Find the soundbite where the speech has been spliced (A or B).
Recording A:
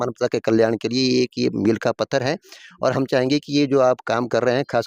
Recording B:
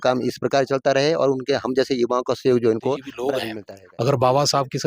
B